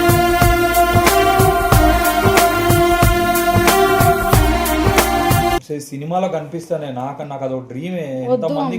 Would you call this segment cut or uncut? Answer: cut